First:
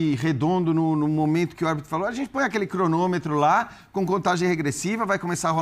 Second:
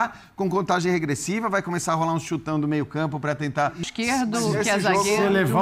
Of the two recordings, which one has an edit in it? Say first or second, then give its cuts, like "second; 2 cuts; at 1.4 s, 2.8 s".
second; 1 cut; at 3.8 s